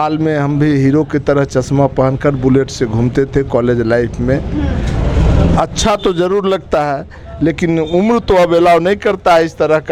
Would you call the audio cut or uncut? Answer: uncut